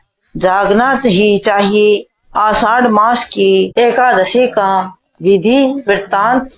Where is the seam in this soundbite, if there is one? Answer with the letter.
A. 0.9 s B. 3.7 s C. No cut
B